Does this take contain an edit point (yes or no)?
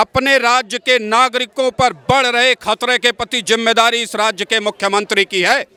no